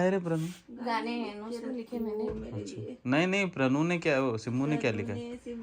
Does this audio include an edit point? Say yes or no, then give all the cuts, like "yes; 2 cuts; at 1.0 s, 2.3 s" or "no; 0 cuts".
no; 0 cuts